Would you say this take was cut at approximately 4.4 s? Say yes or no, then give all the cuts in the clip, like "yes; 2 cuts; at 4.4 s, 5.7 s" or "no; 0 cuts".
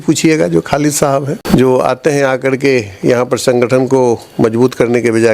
no; 1 cut; at 1.4 s